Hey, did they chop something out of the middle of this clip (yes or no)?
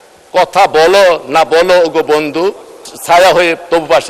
yes